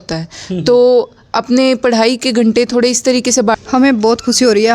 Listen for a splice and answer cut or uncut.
cut